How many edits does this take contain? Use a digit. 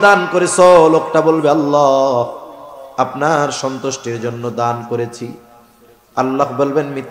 0